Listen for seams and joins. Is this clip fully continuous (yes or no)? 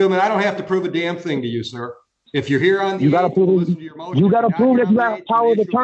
yes